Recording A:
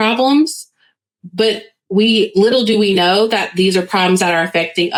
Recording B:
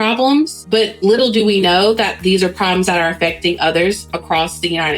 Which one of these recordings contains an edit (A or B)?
B